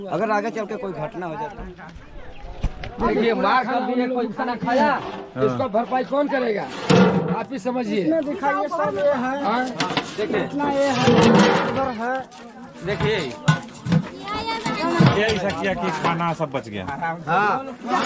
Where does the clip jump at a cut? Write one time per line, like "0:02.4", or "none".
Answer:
0:01.4

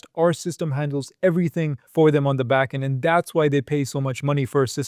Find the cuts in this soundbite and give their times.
0:01.8

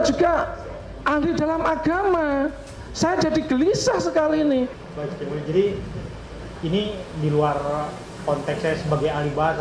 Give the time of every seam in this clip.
0:04.8

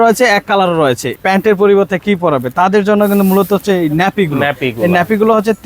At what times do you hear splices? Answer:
0:01.1

